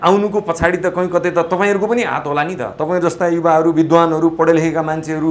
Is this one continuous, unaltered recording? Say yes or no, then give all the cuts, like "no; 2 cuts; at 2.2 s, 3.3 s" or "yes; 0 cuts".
yes; 0 cuts